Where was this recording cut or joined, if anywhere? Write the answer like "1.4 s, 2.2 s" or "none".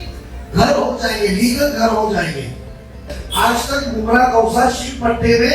3.2 s